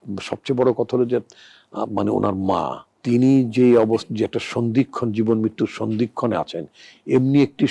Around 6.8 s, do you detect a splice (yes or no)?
no